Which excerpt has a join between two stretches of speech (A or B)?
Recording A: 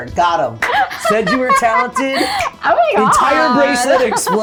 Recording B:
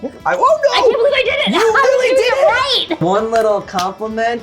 B